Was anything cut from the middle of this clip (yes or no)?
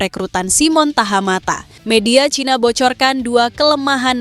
yes